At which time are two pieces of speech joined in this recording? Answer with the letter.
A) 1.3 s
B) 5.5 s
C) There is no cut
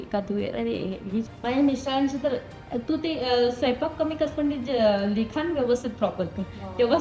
A